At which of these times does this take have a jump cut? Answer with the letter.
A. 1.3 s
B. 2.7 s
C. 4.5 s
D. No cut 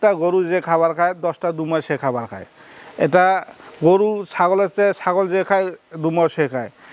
D